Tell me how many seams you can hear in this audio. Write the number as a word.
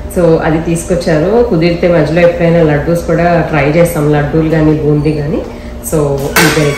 zero